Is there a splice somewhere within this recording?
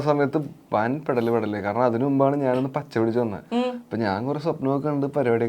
no; 0 cuts

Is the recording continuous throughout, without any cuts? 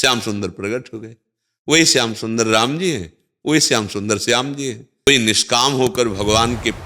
no; 1 cut; at 5.1 s

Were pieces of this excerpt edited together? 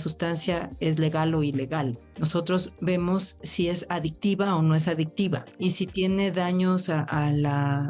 yes; 2 cuts; at 2.0 s, 5.5 s

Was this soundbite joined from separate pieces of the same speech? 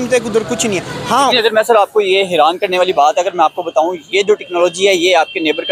yes; 1 cut; at 1.3 s

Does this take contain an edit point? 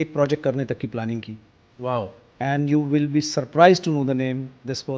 no; 0 cuts

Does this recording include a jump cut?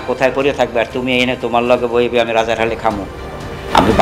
no; 0 cuts

